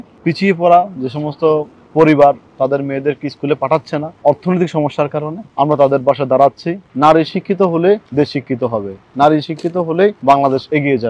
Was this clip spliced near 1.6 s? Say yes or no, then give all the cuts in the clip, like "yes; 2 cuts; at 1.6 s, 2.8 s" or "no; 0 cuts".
no; 5 cuts; at 4.1 s, 5.4 s, 6.8 s, 8.1 s, 10.2 s